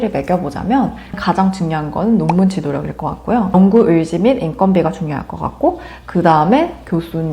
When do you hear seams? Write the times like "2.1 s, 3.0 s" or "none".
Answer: 1.2 s, 3.5 s